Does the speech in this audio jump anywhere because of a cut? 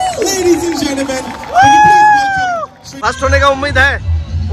yes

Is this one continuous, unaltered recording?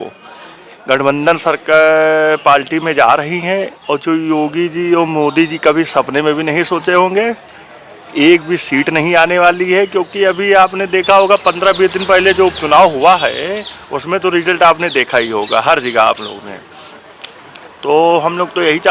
yes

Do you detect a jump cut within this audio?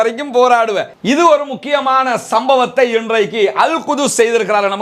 yes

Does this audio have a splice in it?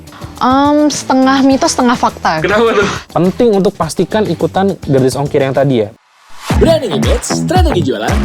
yes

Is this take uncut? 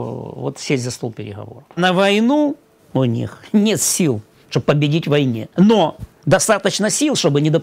no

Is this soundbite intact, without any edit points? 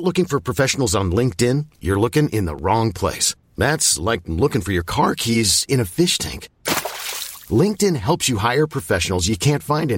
yes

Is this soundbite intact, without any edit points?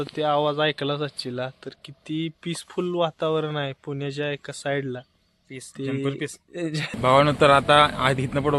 no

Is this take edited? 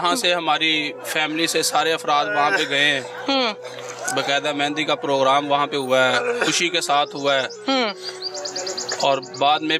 no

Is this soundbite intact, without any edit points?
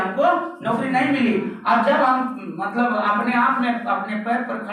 yes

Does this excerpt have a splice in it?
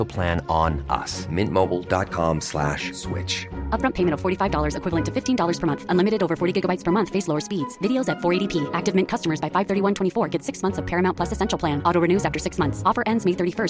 no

